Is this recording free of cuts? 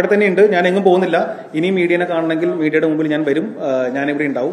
yes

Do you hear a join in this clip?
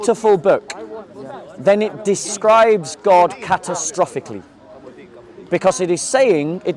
no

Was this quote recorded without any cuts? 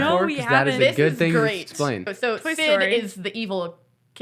no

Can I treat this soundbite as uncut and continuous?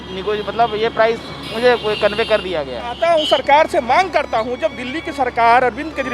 no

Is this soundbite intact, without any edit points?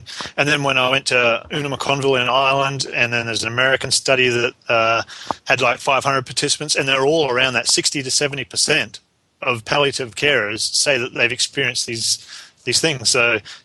yes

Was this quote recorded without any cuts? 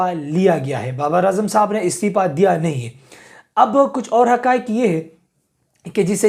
yes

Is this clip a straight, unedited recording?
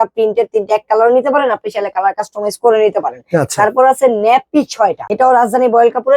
no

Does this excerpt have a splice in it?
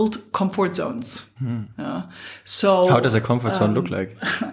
no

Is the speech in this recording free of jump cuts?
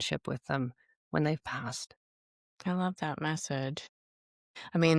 yes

